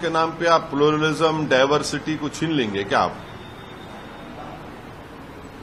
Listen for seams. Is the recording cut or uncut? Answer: uncut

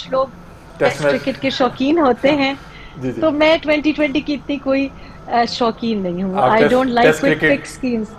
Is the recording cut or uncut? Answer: uncut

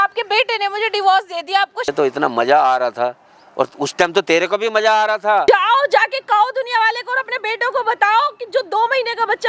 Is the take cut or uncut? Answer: cut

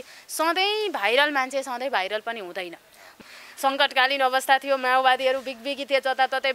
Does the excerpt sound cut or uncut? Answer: cut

